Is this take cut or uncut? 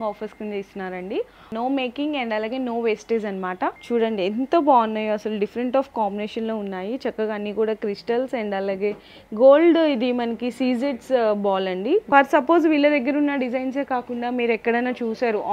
cut